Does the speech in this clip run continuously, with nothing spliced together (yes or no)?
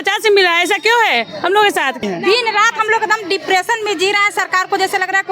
no